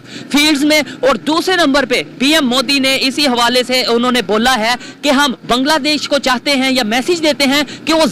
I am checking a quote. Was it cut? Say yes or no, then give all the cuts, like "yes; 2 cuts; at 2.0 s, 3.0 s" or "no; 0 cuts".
no; 0 cuts